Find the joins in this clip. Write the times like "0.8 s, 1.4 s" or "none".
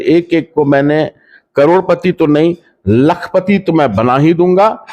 none